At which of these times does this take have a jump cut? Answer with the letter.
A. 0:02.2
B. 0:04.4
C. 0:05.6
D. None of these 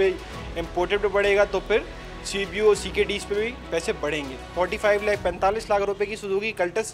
B